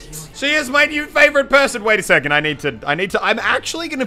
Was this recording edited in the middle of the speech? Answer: no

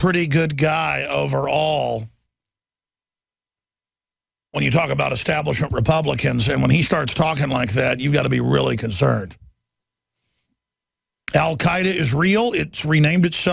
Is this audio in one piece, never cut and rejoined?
yes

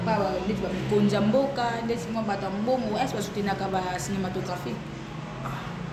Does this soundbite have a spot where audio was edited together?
no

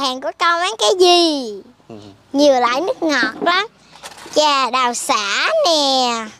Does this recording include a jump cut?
no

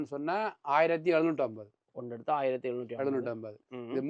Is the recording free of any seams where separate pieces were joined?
yes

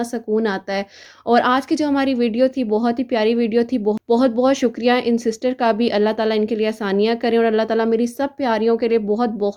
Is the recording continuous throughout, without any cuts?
yes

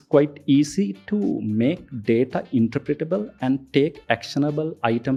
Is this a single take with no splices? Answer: yes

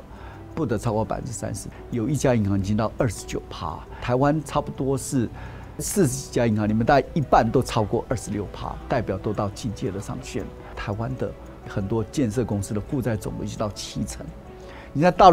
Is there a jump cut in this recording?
yes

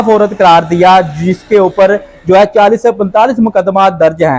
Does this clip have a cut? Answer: no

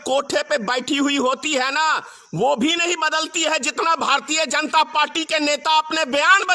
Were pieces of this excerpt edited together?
no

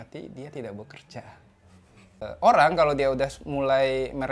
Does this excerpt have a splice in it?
yes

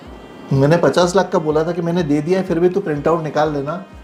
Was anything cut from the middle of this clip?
no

